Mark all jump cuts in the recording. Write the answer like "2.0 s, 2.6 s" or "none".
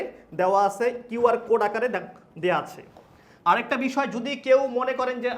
3.3 s